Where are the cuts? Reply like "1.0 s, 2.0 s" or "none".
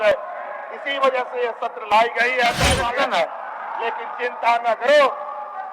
2.7 s